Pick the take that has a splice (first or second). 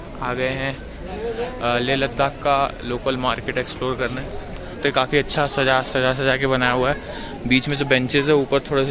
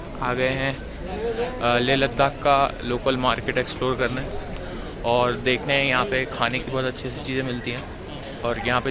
first